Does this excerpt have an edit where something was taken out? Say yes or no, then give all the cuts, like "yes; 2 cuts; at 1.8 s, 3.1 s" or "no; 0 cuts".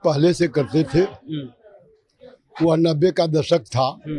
no; 0 cuts